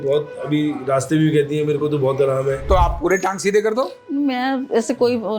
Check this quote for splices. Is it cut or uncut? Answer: cut